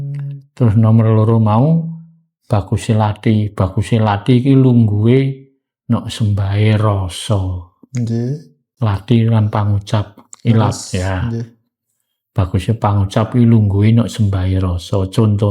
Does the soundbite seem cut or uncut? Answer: uncut